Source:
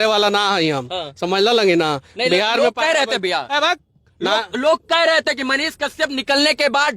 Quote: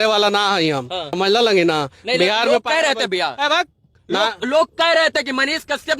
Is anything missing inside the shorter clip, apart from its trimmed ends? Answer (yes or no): yes